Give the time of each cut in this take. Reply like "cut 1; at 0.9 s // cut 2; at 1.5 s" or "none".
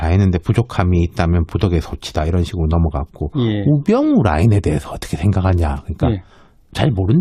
cut 1; at 5.6 s